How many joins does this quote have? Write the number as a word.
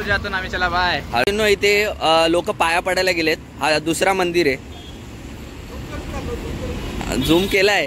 one